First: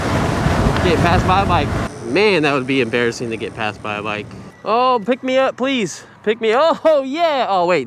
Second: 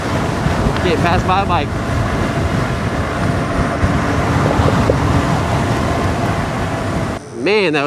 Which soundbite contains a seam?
first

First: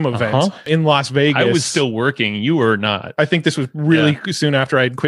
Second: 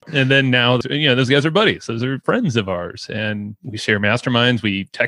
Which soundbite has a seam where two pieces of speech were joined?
second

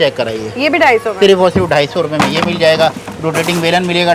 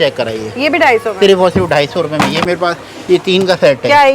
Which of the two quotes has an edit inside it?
second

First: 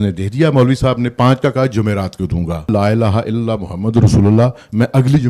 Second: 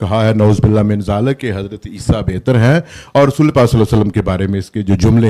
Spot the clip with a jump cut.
first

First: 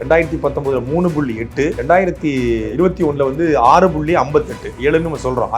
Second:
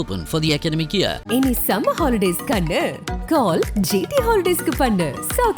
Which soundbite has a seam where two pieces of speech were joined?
first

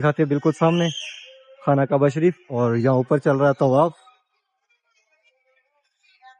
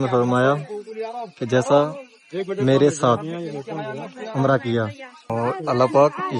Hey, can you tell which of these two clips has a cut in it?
second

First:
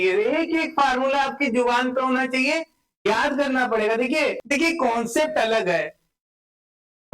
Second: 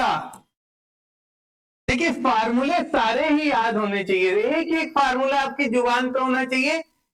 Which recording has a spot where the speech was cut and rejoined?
first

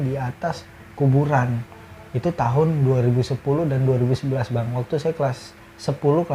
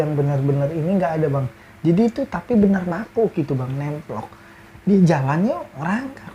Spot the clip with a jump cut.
second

